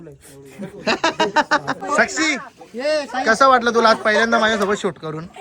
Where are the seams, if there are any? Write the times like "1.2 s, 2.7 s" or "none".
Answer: 1.8 s

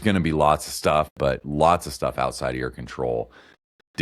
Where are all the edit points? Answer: 1.1 s

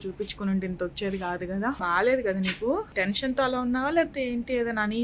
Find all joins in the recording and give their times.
1.8 s, 2.9 s

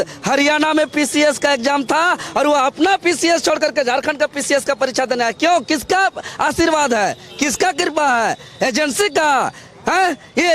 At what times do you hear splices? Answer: none

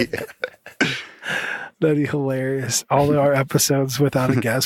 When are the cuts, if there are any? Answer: 1.7 s

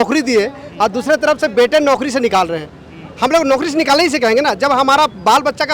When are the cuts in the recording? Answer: none

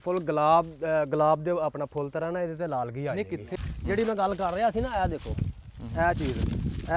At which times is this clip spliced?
3.6 s

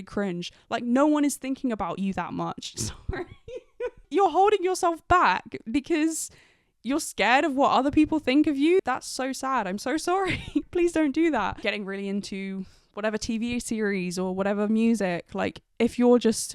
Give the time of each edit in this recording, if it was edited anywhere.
4.0 s, 8.8 s, 10.7 s, 11.6 s

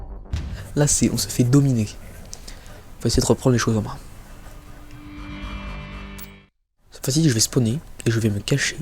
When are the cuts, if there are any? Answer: 0.9 s

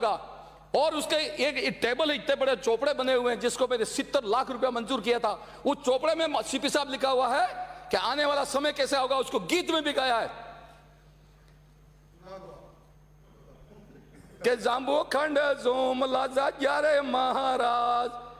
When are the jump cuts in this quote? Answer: none

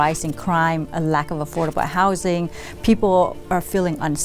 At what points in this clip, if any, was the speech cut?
none

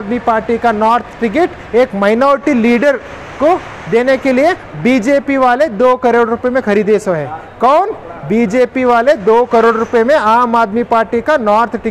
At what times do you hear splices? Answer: none

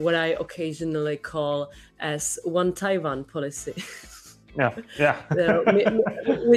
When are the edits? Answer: none

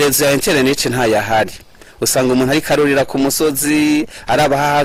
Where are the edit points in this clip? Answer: none

